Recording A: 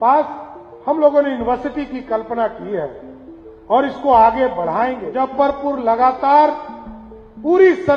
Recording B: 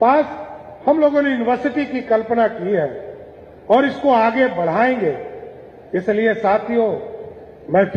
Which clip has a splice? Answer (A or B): A